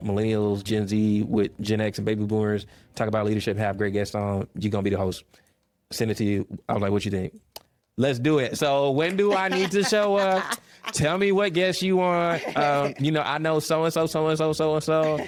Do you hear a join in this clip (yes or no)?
no